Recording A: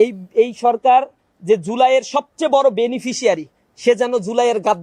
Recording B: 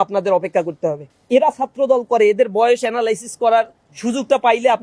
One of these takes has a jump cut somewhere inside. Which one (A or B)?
B